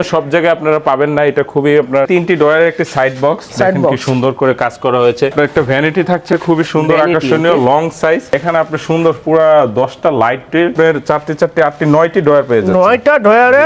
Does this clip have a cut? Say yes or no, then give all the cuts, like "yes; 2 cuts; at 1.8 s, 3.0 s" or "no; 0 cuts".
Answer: yes; 3 cuts; at 2.0 s, 5.3 s, 10.7 s